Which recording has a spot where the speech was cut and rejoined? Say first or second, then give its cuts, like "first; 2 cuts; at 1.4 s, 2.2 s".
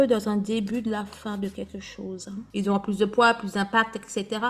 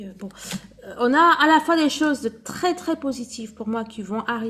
first; 1 cut; at 2.5 s